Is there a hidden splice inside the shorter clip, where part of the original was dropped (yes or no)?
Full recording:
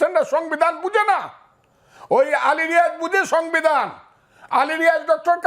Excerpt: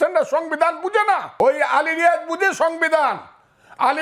yes